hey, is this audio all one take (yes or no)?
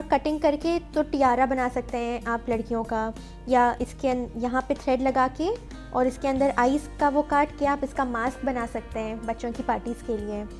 yes